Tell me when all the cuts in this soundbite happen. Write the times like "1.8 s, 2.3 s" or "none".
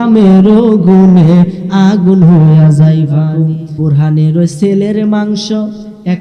3.5 s